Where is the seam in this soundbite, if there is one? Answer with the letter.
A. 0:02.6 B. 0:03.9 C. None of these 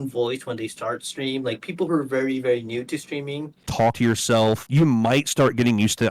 B